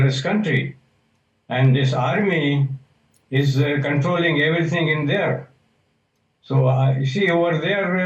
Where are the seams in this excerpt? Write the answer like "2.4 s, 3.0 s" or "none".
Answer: none